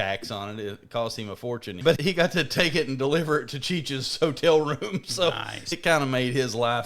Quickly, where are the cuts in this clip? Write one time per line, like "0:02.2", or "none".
0:01.9
0:05.7